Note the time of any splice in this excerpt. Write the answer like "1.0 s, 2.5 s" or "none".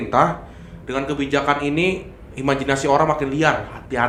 none